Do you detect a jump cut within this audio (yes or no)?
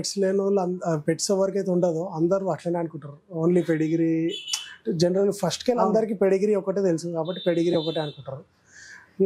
no